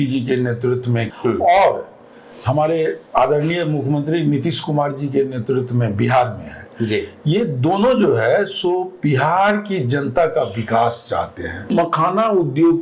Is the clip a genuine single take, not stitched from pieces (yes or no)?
no